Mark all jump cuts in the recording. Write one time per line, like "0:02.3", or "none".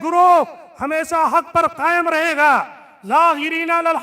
none